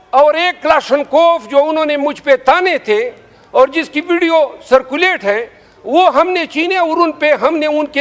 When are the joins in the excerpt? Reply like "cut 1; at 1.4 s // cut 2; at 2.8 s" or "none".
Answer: none